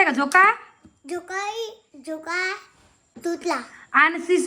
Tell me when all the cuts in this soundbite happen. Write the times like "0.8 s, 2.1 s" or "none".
3.1 s